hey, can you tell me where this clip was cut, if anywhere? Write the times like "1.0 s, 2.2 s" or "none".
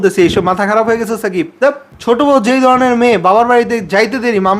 1.9 s